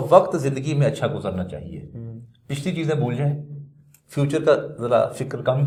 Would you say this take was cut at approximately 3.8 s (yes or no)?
no